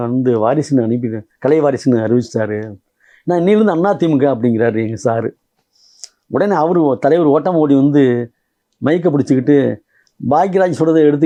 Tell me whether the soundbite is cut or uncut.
uncut